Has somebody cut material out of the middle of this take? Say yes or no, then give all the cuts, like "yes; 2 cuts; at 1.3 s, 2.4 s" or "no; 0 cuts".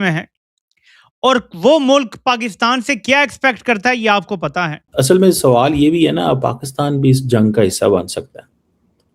yes; 1 cut; at 4.8 s